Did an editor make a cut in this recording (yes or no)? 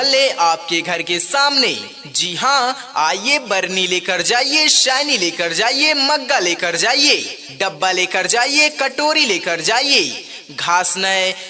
no